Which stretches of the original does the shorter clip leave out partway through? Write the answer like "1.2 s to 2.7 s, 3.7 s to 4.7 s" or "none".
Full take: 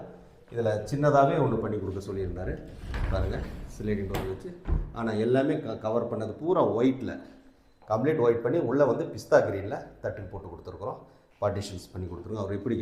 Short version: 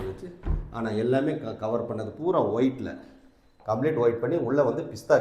none